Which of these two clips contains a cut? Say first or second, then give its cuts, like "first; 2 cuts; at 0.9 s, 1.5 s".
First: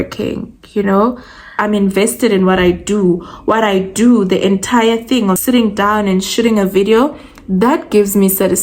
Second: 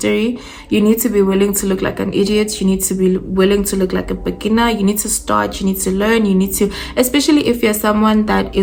first; 2 cuts; at 1.5 s, 5.4 s